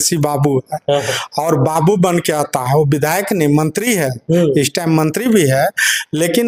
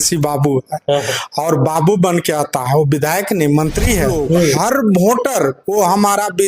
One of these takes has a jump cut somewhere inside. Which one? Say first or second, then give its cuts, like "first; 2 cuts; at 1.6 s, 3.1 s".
second; 1 cut; at 4.5 s